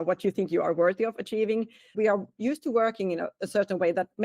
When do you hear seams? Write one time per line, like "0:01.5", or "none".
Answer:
0:01.9